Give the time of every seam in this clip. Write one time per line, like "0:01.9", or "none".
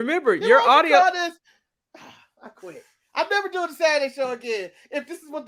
none